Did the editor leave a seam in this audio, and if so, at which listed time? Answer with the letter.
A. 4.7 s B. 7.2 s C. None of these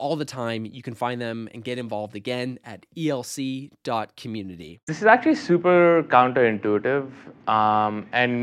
A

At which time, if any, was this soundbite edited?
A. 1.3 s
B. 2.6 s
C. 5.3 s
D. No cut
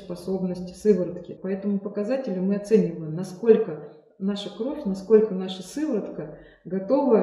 A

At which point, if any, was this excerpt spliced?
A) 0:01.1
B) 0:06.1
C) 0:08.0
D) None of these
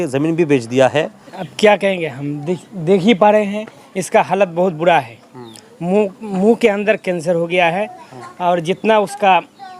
A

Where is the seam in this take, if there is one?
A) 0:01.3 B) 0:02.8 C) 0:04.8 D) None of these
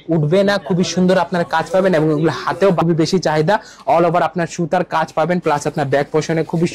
B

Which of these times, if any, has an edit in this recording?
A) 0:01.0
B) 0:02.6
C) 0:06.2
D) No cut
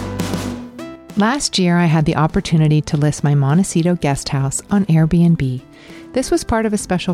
A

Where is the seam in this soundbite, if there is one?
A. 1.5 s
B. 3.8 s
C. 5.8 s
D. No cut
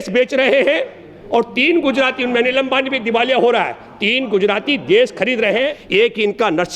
C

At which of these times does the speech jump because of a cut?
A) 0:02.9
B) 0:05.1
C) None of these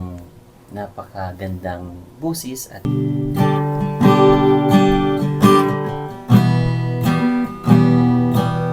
A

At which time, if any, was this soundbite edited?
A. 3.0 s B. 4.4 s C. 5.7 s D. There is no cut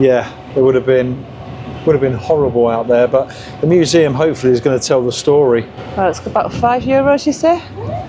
D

